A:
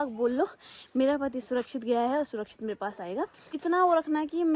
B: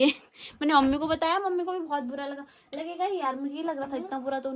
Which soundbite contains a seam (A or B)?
A